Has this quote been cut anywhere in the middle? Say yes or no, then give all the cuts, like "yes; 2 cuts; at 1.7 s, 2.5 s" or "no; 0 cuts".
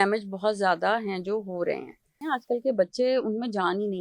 yes; 1 cut; at 2.2 s